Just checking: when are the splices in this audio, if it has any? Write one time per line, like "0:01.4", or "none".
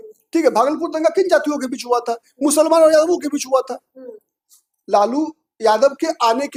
none